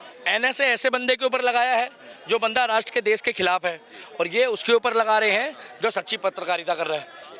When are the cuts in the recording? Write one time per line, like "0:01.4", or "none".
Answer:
none